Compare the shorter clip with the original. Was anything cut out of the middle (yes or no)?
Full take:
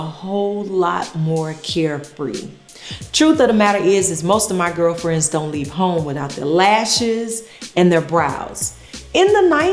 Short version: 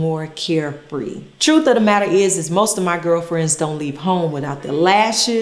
yes